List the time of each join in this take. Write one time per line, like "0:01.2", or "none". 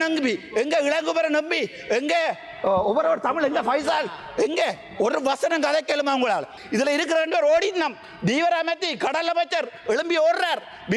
0:06.6